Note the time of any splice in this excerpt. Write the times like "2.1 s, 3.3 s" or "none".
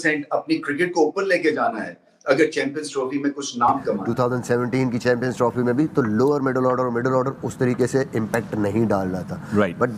4.1 s